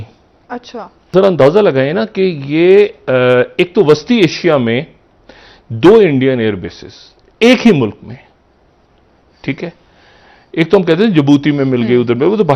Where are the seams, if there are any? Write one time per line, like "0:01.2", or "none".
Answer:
0:01.1